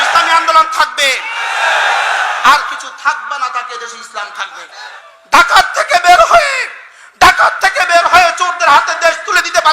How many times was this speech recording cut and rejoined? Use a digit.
1